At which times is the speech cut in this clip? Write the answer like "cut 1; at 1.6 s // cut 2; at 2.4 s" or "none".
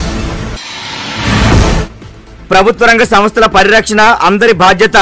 none